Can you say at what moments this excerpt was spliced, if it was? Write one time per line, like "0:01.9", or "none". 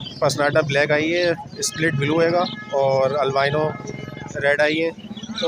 none